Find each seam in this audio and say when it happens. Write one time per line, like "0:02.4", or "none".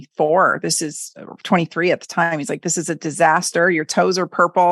none